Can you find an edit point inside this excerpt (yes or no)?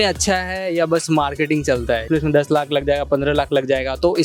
yes